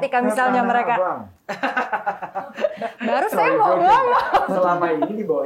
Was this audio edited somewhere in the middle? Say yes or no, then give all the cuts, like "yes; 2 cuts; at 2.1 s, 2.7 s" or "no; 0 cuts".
yes; 1 cut; at 4.4 s